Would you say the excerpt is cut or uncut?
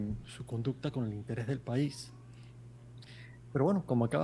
uncut